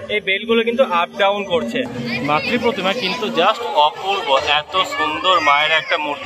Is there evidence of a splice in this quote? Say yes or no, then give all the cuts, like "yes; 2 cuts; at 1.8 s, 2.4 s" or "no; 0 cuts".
yes; 1 cut; at 1.9 s